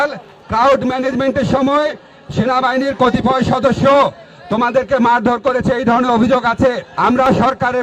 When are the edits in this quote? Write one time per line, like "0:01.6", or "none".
0:06.9

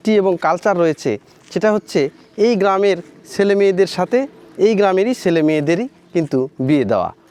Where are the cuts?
none

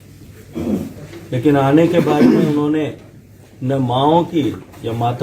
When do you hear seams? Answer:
0:01.0

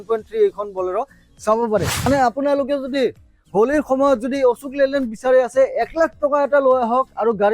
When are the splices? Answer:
0:02.1

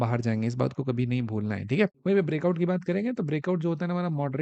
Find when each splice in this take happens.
none

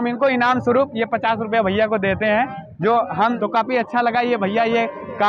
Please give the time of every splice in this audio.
0:03.4

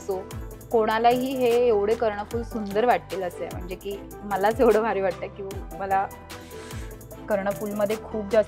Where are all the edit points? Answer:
none

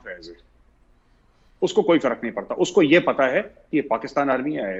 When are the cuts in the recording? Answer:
none

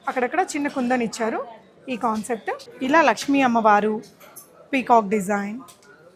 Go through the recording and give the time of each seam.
0:02.7

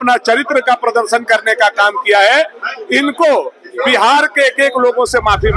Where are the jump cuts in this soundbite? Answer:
none

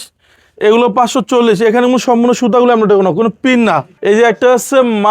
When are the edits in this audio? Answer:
0:03.9

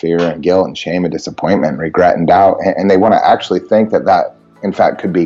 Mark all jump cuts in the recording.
none

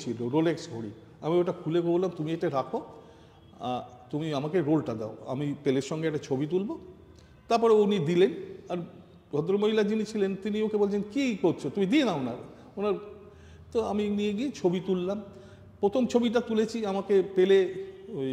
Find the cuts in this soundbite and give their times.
none

